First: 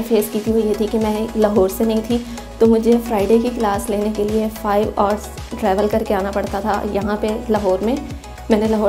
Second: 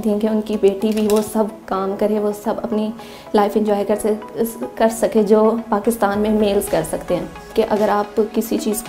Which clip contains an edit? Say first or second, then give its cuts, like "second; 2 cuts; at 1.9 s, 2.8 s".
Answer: second; 1 cut; at 7.4 s